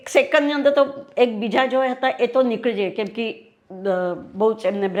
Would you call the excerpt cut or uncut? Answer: uncut